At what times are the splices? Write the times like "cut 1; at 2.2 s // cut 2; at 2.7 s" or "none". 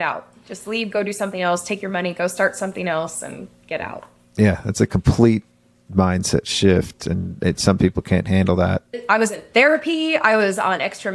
none